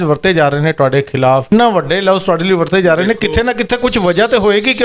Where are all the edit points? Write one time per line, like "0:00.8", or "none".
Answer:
0:01.5

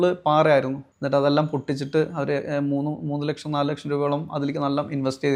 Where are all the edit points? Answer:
none

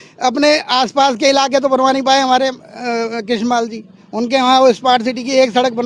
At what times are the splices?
none

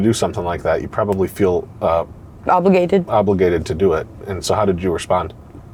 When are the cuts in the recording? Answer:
none

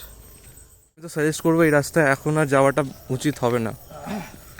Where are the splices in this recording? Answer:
0:01.1

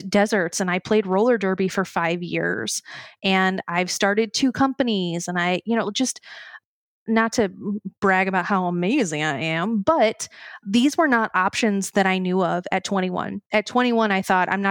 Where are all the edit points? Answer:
none

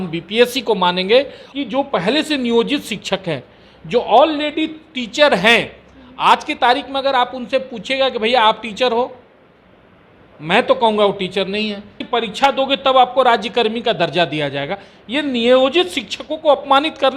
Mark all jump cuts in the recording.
0:01.4
0:12.0

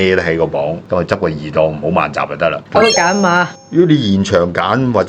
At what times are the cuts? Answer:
0:02.6

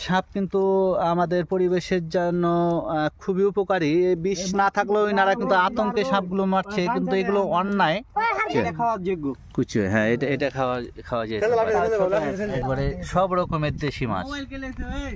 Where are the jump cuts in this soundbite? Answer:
0:08.5
0:12.5

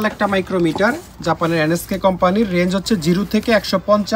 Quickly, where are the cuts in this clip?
none

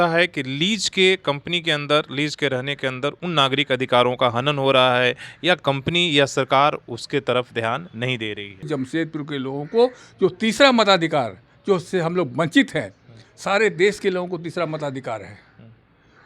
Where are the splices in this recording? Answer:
0:08.7

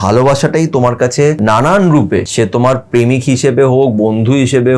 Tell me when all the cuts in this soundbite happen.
0:01.4
0:02.3

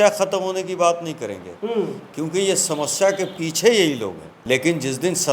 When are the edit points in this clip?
0:04.3

